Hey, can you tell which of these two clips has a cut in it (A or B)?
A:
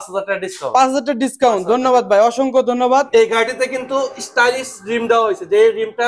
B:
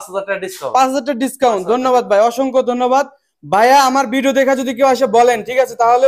A